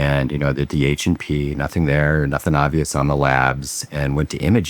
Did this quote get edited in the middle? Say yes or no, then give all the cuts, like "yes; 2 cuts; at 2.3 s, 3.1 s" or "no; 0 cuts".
no; 0 cuts